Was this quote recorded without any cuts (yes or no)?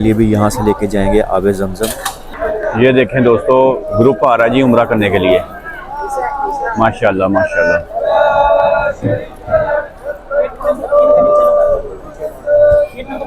no